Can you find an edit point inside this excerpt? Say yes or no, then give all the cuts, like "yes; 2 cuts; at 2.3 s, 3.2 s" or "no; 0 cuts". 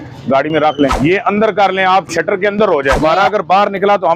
yes; 2 cuts; at 0.9 s, 3.0 s